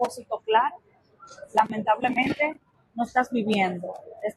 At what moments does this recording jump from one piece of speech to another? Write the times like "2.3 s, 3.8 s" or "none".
none